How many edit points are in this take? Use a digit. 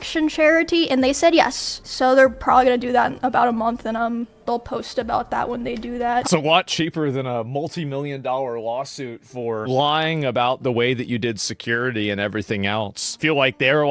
1